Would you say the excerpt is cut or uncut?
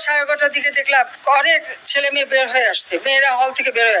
cut